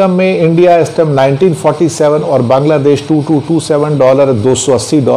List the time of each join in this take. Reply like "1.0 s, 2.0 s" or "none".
none